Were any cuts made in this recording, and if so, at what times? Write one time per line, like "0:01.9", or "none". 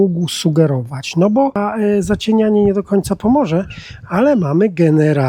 0:01.5